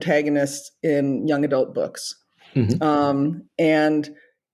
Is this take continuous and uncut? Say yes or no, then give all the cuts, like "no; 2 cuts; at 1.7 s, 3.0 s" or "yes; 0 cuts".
yes; 0 cuts